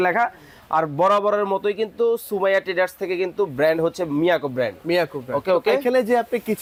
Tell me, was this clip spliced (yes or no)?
no